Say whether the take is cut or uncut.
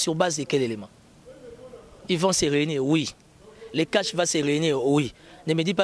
uncut